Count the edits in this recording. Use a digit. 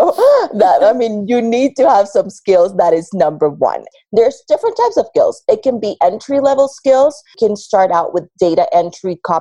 2